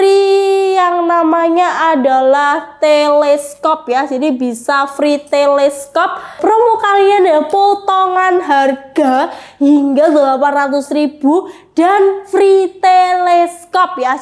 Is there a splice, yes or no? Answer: yes